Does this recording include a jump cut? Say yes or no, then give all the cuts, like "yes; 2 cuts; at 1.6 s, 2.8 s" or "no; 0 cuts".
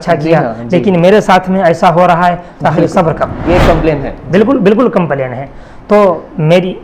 yes; 1 cut; at 3.3 s